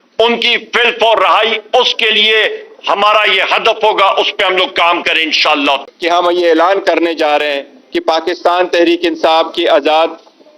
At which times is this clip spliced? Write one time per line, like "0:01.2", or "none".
0:05.9